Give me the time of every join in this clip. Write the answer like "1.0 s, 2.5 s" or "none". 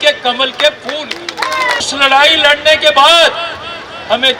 1.9 s